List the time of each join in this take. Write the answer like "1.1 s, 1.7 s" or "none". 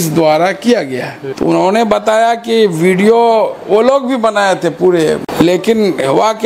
1.1 s, 5.3 s